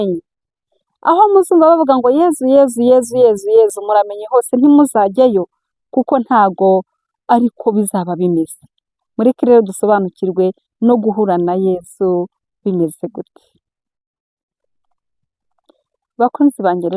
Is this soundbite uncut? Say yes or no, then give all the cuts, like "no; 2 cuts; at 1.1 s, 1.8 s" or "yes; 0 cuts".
yes; 0 cuts